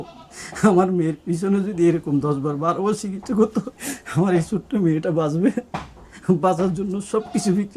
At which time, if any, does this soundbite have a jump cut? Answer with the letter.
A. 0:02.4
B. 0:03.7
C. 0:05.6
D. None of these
D